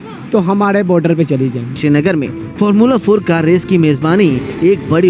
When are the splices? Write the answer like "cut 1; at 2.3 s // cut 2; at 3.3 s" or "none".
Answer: cut 1; at 1.8 s